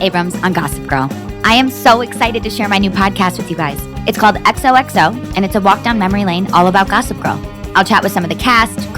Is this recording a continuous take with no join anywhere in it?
no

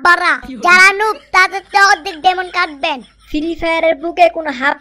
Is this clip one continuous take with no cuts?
yes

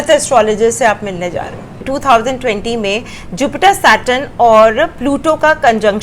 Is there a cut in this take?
yes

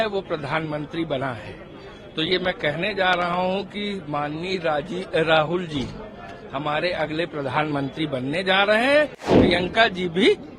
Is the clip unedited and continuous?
no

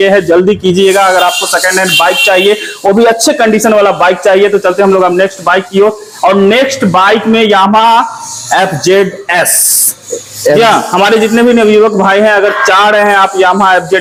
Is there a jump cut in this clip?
no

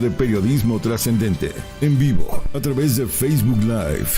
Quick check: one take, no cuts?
no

